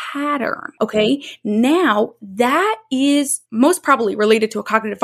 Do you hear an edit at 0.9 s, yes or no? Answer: yes